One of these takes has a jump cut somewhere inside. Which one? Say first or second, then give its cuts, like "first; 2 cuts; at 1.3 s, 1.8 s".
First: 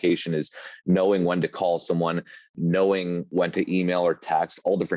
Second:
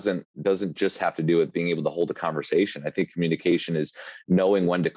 first; 2 cuts; at 2.5 s, 3.3 s